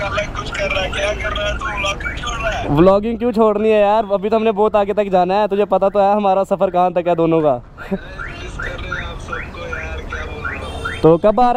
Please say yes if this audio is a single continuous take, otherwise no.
yes